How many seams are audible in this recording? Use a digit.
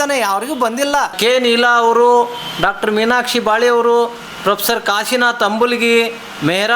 1